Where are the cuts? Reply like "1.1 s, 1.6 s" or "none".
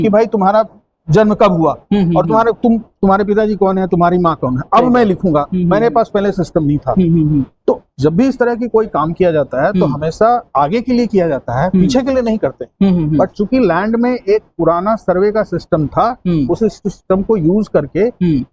none